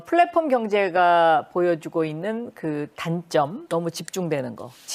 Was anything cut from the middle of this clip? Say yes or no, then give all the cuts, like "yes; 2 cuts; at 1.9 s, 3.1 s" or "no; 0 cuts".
no; 0 cuts